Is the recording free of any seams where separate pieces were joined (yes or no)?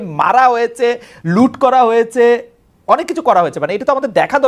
yes